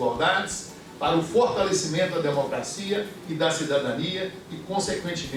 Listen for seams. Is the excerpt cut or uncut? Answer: uncut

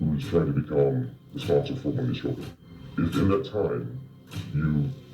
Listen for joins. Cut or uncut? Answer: cut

